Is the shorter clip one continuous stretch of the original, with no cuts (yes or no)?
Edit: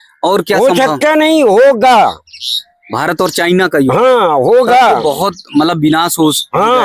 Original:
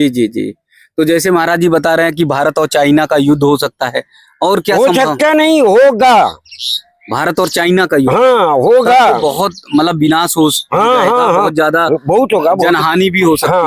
yes